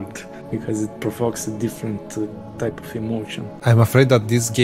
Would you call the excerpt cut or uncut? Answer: cut